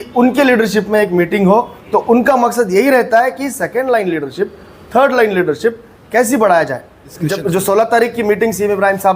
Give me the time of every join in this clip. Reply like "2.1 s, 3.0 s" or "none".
1.8 s, 7.1 s